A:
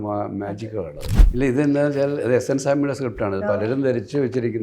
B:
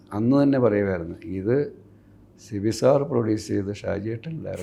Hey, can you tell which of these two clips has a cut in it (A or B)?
A